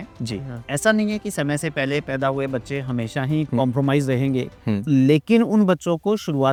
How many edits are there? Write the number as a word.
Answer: zero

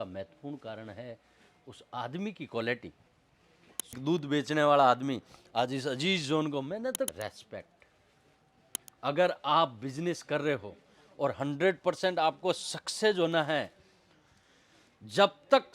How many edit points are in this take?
two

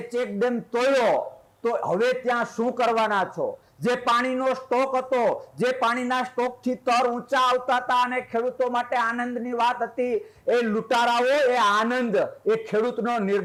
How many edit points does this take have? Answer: zero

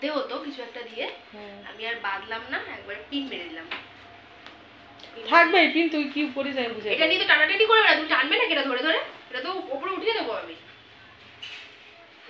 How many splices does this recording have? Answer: zero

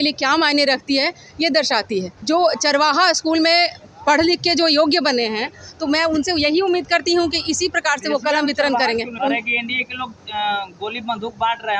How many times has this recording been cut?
two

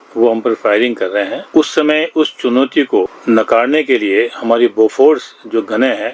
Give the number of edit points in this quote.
two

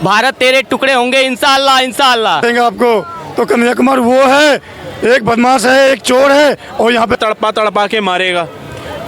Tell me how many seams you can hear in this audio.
two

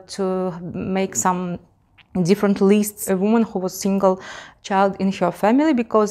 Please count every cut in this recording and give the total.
one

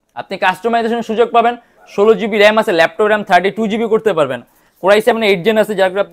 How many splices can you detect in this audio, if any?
zero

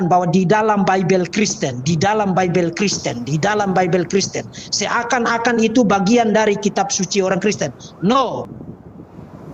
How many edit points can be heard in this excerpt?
one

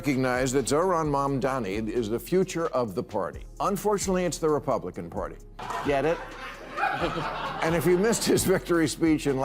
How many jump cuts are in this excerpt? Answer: one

